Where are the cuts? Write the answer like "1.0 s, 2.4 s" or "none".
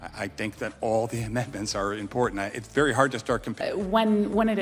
3.5 s